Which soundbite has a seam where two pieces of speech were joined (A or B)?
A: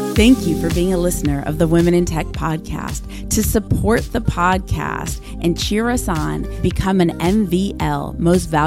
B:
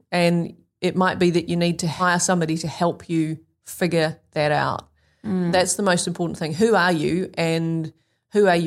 B